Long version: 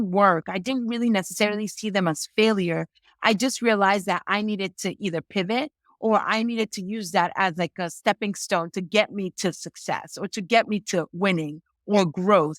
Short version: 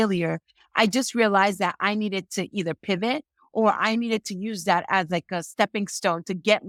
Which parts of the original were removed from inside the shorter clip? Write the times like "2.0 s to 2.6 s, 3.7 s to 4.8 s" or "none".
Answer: none